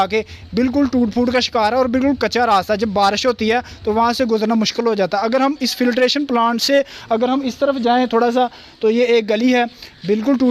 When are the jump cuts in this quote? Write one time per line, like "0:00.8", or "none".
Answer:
none